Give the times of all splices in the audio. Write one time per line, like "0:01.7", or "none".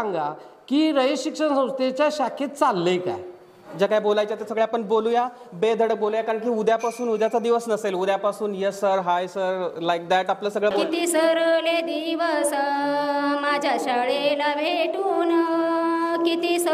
0:03.6
0:10.8